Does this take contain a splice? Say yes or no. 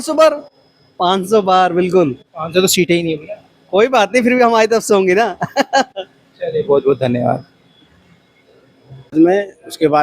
yes